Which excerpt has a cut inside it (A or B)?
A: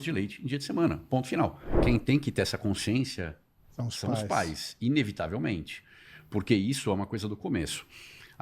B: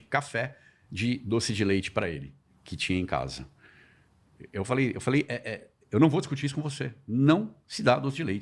A